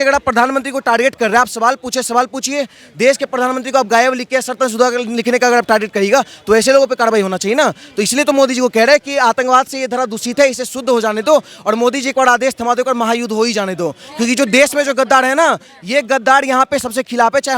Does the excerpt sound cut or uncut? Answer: uncut